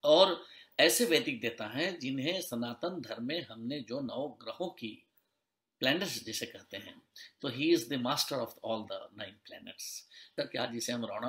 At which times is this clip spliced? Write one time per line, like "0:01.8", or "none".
0:10.2